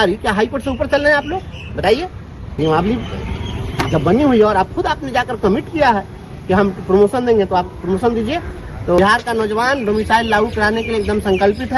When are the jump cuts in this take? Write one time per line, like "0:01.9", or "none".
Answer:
0:02.4
0:09.0